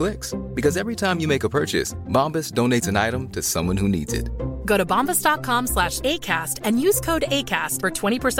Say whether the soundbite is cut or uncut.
uncut